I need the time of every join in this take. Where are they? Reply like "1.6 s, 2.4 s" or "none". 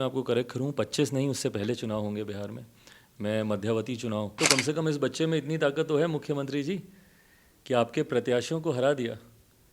4.3 s